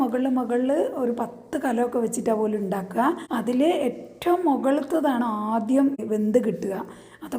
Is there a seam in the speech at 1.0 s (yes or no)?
no